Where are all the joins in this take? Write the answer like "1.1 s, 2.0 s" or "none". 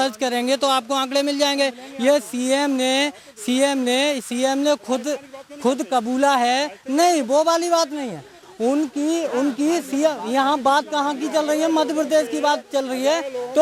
none